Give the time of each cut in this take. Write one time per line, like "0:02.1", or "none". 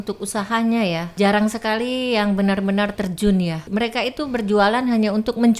0:01.1
0:03.6